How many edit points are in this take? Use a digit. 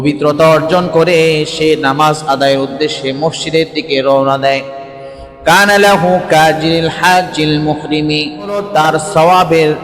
1